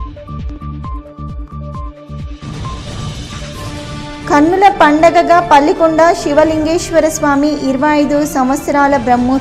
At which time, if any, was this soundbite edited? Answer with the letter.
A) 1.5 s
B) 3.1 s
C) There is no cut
A